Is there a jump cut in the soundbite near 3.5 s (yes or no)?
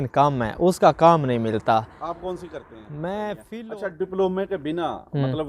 yes